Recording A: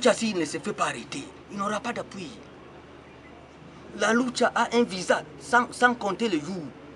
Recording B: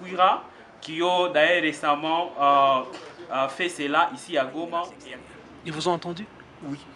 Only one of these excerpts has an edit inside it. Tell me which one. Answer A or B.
B